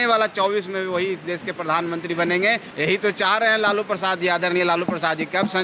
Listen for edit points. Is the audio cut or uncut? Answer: cut